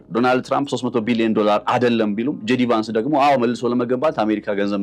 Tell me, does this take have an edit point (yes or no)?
no